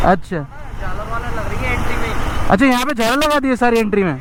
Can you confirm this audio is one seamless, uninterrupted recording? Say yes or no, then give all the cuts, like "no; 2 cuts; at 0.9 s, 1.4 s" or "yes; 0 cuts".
yes; 0 cuts